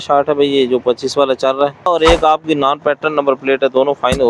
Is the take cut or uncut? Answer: cut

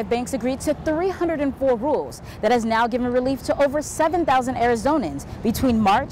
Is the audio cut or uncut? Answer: uncut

